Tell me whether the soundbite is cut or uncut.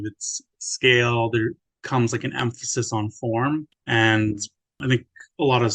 cut